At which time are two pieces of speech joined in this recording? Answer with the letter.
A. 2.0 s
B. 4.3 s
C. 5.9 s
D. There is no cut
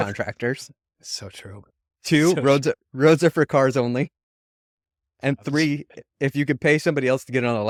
D